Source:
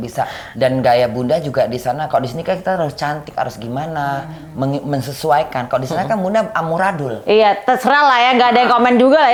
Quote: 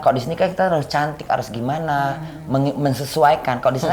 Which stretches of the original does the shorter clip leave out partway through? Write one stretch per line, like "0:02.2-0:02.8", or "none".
none

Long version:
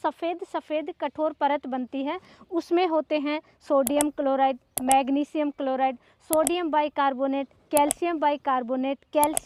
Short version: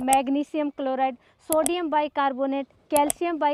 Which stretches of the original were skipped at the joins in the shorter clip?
none

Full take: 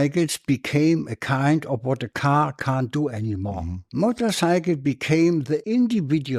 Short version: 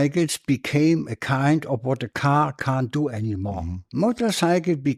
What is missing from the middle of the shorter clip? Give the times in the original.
none

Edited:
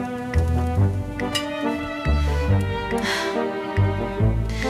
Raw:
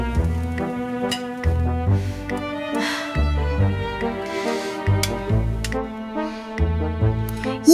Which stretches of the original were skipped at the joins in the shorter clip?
none

